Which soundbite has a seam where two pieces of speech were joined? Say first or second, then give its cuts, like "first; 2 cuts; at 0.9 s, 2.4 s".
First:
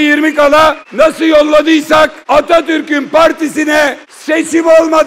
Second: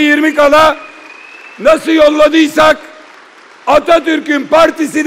first; 3 cuts; at 0.8 s, 2.2 s, 4.1 s